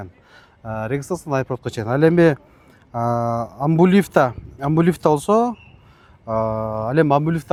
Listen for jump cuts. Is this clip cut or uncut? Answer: uncut